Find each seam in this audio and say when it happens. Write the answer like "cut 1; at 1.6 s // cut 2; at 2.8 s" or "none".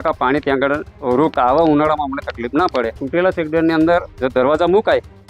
cut 1; at 1.3 s // cut 2; at 3.0 s